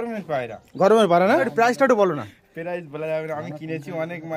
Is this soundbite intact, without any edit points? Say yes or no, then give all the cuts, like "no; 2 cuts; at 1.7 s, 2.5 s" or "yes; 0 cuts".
no; 1 cut; at 1.5 s